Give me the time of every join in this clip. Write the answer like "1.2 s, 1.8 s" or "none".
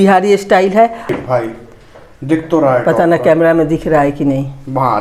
1.1 s